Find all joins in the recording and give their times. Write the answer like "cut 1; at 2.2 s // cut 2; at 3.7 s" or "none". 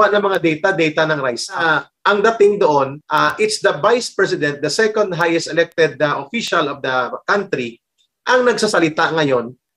cut 1; at 1.6 s // cut 2; at 3.0 s